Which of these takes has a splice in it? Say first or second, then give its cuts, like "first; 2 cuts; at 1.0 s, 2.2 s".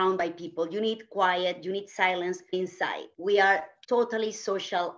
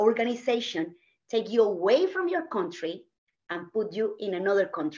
first; 2 cuts; at 2.5 s, 3.7 s